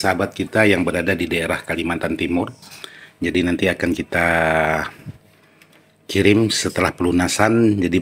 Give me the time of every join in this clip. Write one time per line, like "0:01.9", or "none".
none